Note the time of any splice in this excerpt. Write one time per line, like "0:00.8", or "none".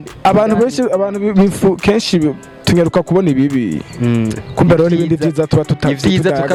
none